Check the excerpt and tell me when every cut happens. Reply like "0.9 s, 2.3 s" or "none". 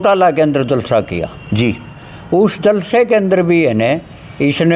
none